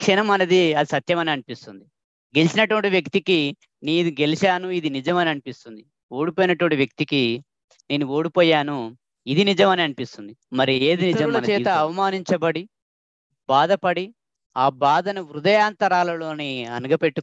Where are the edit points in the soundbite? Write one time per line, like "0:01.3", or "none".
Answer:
0:11.3